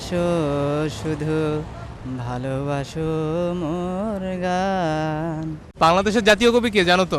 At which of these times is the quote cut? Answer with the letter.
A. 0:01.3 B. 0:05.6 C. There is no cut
B